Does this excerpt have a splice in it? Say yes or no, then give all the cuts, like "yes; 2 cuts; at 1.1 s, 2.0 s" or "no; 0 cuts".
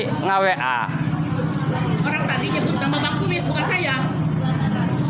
no; 0 cuts